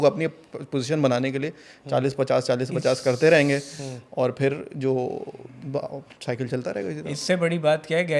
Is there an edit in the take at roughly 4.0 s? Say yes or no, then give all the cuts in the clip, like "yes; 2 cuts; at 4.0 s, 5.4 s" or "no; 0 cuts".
no; 0 cuts